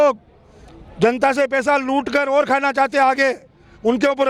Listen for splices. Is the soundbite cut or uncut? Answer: uncut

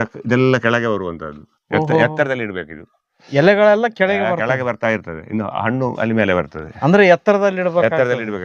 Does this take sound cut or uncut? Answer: uncut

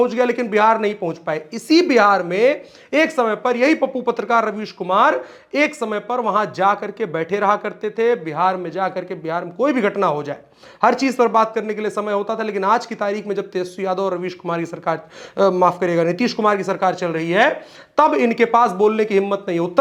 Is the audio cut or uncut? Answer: uncut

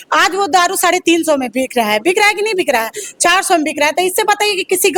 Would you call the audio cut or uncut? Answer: uncut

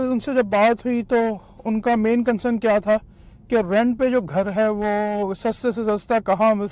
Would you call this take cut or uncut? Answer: uncut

